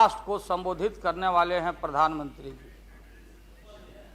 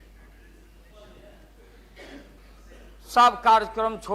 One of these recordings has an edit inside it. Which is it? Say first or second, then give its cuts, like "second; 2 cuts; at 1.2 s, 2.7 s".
second; 1 cut; at 2.4 s